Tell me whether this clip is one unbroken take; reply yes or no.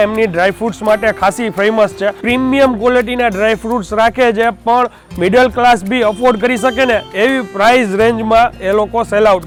yes